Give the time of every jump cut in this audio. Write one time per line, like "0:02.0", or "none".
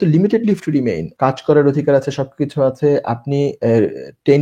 0:01.1